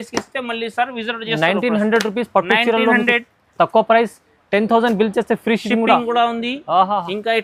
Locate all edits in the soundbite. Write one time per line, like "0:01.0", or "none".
none